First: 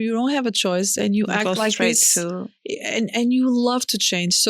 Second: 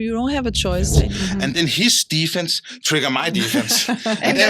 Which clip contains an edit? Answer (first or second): second